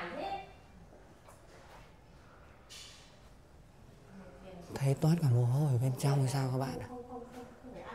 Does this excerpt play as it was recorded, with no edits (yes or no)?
yes